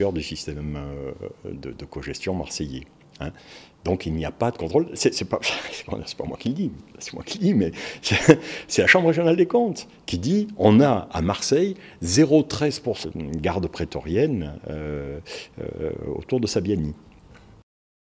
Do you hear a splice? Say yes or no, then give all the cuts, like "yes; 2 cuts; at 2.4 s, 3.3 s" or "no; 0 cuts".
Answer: no; 0 cuts